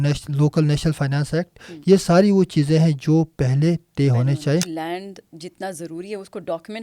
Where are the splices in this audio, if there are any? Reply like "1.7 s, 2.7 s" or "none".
4.7 s

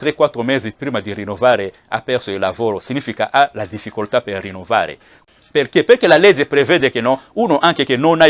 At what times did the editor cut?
5.2 s

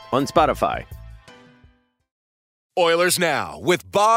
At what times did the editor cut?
2.5 s

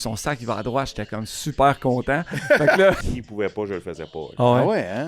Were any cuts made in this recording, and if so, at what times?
3.1 s, 4.3 s

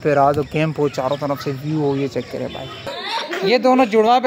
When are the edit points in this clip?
3.0 s

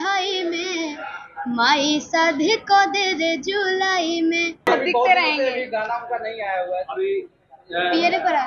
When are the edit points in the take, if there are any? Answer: 4.7 s

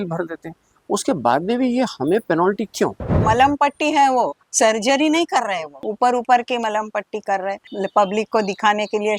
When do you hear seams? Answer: 3.1 s, 5.8 s, 7.7 s

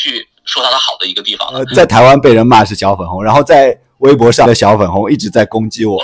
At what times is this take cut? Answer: 1.7 s, 4.5 s

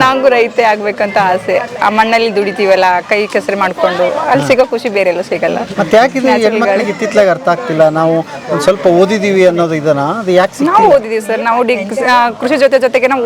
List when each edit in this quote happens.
none

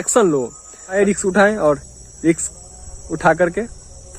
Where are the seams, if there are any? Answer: 0.9 s

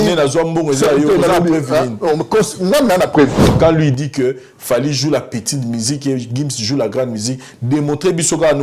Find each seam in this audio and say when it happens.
3.5 s

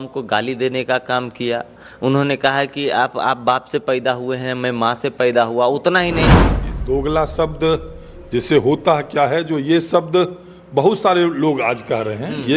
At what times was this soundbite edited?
6.5 s

